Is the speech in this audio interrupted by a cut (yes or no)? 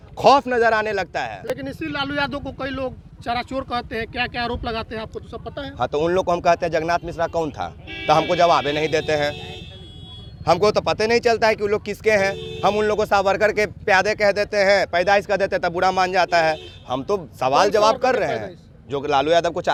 no